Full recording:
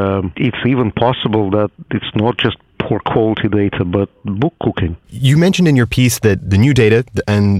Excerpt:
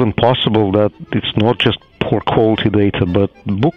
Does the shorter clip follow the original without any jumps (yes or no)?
yes